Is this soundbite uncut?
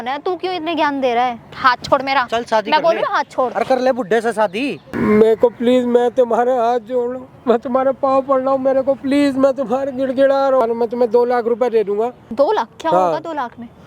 no; 4 cuts; at 1.4 s, 4.8 s, 10.6 s, 12.2 s

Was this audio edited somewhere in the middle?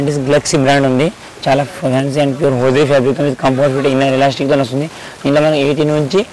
no; 0 cuts

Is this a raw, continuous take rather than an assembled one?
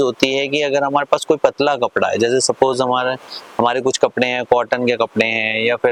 yes; 0 cuts

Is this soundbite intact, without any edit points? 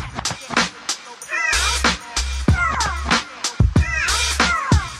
yes; 0 cuts

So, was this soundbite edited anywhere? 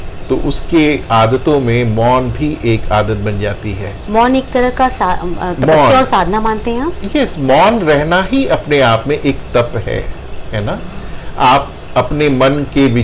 no; 0 cuts

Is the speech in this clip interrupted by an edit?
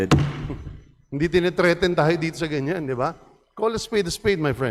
no; 0 cuts

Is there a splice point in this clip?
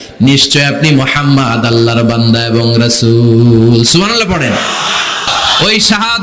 yes; 1 cut; at 5.3 s

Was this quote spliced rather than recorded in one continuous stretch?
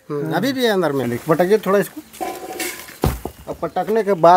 yes; 1 cut; at 1.0 s

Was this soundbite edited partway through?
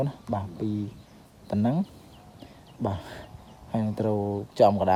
no; 0 cuts

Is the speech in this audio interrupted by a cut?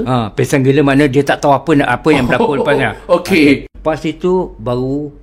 yes; 1 cut; at 3.7 s

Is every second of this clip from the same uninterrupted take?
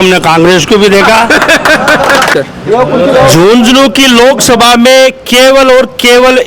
no; 1 cut; at 2.3 s

